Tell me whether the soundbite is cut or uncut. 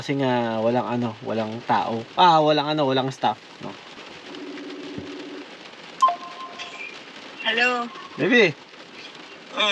cut